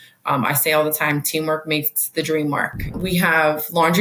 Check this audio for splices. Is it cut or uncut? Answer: cut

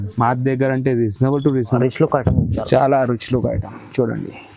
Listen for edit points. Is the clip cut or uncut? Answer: cut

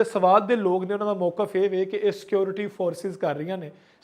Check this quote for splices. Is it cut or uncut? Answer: uncut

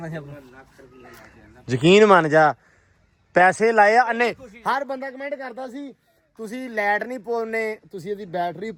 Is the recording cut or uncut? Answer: uncut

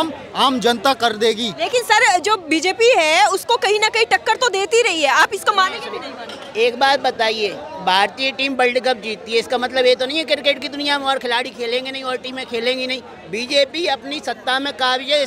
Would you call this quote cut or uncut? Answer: uncut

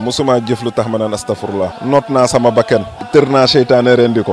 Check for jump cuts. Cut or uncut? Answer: cut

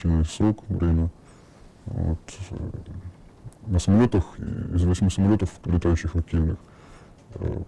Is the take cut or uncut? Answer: cut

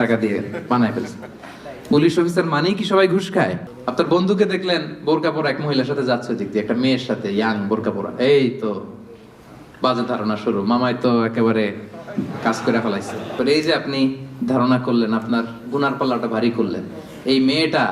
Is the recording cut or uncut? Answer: cut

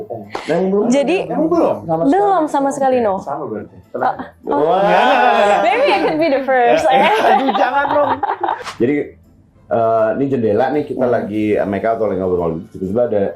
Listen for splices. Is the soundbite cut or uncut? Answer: cut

